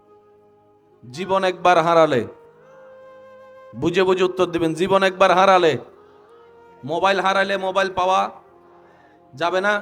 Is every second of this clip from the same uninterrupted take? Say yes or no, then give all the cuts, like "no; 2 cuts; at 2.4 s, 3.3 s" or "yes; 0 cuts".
no; 1 cut; at 0.9 s